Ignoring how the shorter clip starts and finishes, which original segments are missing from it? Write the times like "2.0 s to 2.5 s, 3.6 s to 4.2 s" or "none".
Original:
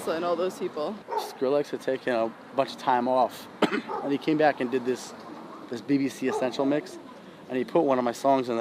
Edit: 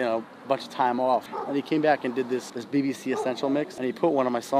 3.4 s to 3.9 s, 5.1 s to 5.7 s, 6.9 s to 7.4 s